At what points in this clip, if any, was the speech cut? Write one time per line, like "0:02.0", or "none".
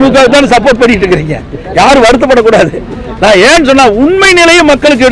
none